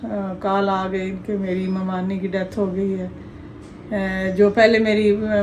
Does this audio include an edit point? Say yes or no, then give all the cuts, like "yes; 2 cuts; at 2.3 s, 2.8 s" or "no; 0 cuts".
no; 0 cuts